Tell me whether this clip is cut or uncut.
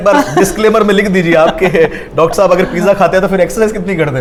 uncut